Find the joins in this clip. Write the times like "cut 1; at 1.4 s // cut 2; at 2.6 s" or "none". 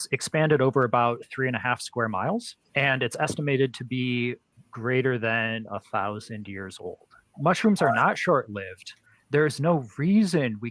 cut 1; at 2.6 s